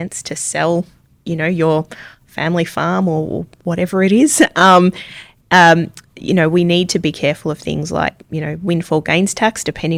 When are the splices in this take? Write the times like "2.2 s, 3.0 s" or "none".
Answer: none